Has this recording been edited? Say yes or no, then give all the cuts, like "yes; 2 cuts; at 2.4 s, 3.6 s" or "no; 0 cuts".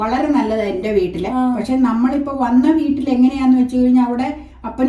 no; 0 cuts